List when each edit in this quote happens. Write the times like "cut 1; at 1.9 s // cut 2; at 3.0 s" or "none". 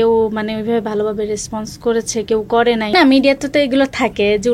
cut 1; at 2.9 s